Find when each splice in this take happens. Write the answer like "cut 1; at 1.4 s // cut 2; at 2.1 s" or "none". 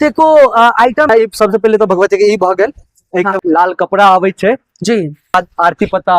cut 1; at 1.1 s // cut 2; at 3.3 s // cut 3; at 5.3 s